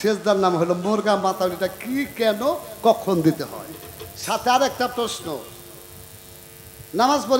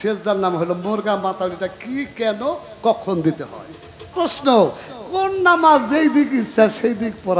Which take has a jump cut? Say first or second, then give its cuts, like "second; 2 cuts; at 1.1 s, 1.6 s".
second; 1 cut; at 4.1 s